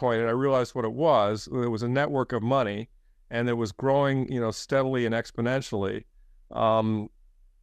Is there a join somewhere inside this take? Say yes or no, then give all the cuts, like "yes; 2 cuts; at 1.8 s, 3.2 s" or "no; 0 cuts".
no; 0 cuts